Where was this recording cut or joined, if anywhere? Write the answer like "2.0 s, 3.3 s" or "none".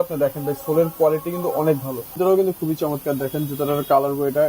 2.1 s